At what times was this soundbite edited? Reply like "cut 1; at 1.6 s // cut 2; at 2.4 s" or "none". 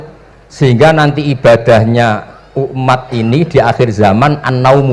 none